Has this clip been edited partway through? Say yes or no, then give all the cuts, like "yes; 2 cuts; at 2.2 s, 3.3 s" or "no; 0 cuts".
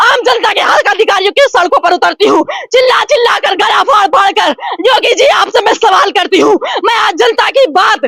no; 0 cuts